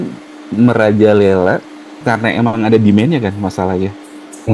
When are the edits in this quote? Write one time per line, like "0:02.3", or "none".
none